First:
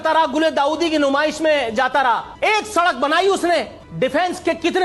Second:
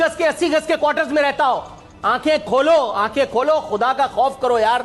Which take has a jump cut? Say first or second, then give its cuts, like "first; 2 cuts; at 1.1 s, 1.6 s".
first; 2 cuts; at 2.3 s, 3.8 s